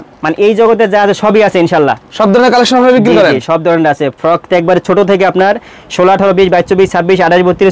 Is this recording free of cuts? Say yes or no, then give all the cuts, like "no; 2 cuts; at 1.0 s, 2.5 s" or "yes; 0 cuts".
yes; 0 cuts